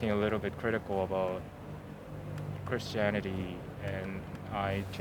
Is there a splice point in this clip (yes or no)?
no